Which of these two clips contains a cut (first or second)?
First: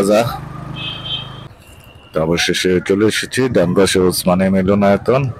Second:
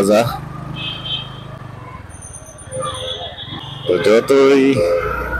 first